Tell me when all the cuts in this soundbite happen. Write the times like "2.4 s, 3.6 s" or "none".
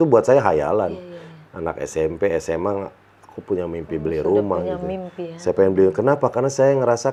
none